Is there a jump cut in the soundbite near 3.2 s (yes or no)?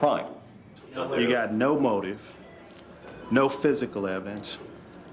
no